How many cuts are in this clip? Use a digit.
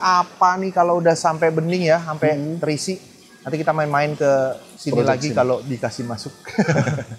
1